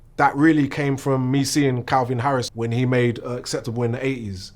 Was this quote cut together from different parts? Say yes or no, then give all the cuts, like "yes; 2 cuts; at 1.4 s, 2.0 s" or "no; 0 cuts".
yes; 1 cut; at 2.5 s